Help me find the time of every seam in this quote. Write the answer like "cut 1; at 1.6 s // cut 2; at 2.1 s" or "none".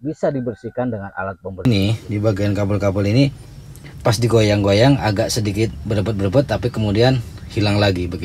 cut 1; at 1.7 s